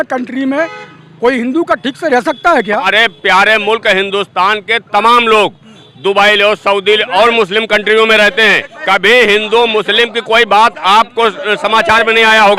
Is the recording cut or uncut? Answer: cut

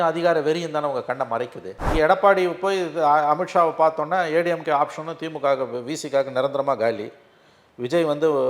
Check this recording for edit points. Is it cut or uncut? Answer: cut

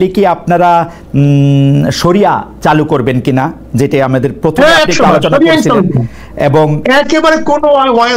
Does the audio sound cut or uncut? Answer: uncut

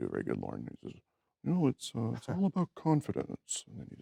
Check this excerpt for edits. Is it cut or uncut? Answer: uncut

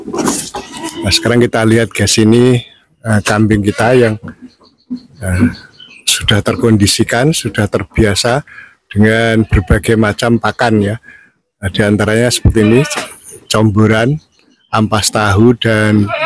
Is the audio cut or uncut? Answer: uncut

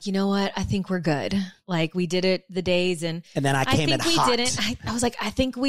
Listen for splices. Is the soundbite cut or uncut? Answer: cut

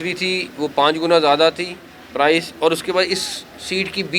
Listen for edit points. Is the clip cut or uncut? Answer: uncut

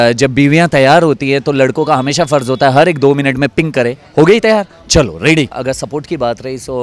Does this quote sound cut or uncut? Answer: cut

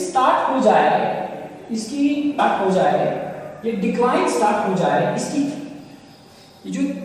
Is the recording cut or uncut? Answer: cut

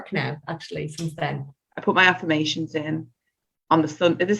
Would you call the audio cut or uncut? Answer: cut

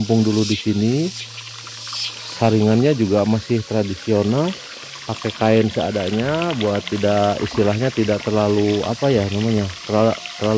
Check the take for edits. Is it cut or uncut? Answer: uncut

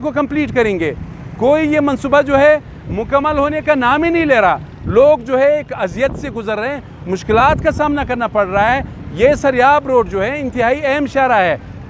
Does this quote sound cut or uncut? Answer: uncut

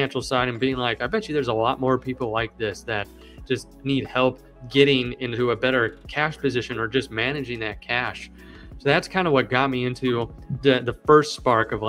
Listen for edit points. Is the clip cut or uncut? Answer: uncut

